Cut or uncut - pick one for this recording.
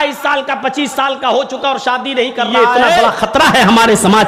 cut